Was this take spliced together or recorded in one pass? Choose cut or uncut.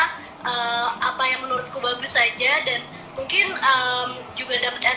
uncut